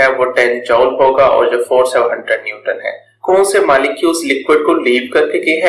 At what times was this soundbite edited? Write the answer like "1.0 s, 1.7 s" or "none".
3.1 s